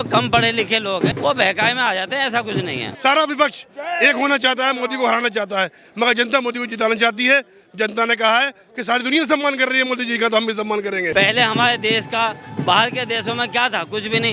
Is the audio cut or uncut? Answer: cut